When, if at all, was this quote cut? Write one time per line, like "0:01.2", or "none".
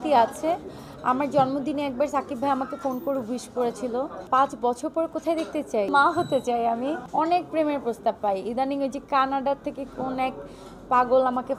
0:04.2
0:05.9
0:07.0